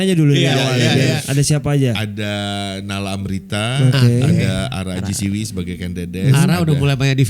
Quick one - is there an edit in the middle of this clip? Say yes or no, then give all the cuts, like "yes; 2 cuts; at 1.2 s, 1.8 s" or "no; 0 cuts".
yes; 1 cut; at 1.2 s